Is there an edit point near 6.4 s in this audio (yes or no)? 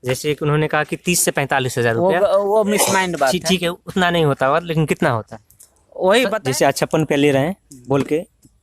yes